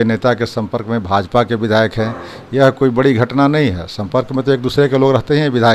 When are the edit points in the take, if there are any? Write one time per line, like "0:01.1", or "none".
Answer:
none